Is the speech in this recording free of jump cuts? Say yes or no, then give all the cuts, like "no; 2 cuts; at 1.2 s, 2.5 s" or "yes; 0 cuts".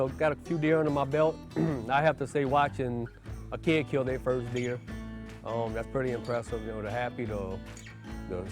yes; 0 cuts